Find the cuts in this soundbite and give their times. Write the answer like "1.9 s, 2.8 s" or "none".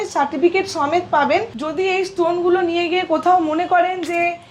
1.6 s